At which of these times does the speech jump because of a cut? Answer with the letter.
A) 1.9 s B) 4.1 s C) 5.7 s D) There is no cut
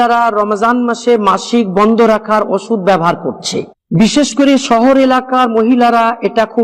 B